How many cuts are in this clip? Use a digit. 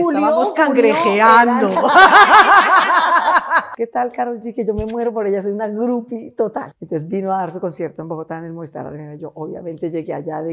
2